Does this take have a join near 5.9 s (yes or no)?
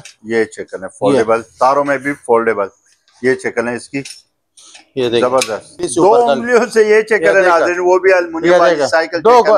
yes